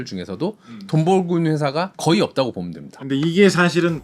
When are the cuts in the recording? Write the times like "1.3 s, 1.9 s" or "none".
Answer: 3.1 s